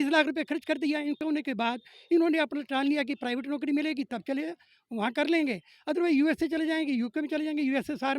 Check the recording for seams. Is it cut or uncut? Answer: cut